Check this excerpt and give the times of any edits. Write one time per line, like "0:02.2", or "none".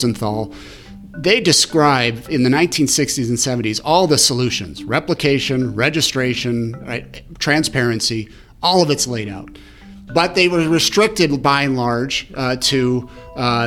0:10.0